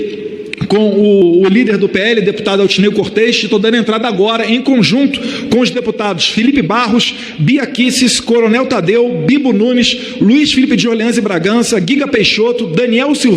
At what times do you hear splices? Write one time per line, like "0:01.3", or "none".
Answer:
0:01.2